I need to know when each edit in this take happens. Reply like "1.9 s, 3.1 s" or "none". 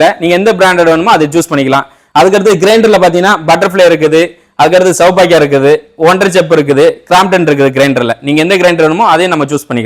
none